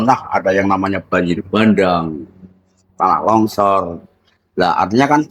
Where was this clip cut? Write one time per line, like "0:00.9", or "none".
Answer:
none